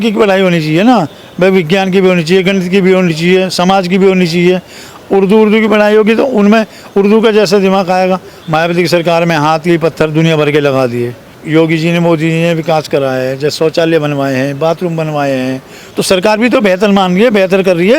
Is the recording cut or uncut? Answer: cut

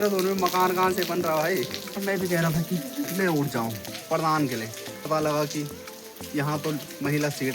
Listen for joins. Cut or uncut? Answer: cut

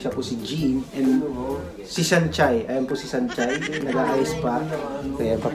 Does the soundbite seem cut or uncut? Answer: uncut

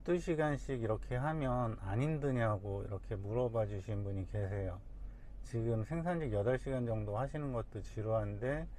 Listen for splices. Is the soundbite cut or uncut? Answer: uncut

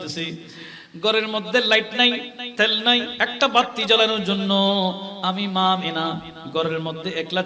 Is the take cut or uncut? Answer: cut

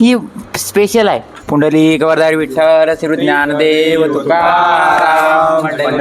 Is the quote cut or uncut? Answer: cut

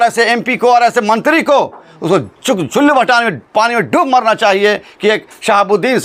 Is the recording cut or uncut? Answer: uncut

